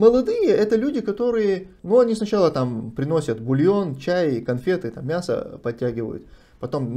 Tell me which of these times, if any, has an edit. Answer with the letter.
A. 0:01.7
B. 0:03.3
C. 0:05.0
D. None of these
A